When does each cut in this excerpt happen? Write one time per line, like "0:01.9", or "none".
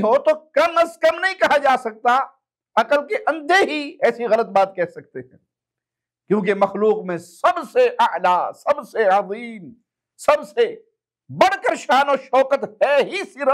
none